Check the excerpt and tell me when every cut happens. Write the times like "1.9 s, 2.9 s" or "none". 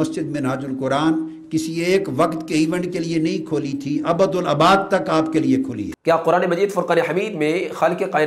5.9 s